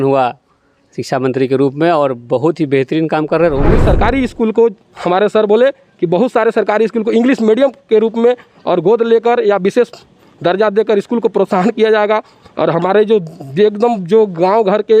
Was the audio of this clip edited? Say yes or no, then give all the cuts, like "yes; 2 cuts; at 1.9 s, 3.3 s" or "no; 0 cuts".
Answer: yes; 1 cut; at 3.7 s